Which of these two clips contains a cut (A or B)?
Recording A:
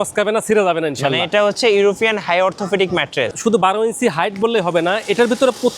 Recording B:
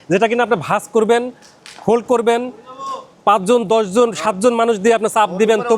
A